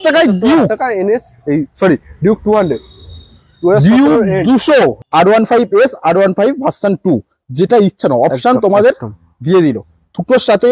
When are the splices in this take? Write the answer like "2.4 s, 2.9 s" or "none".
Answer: 5.0 s